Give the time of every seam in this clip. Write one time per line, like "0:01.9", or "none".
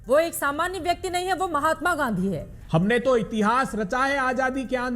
0:02.5